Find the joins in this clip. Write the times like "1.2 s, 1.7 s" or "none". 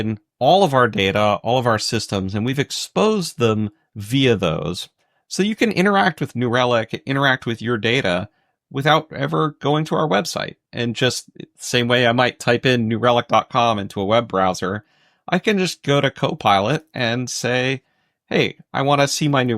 none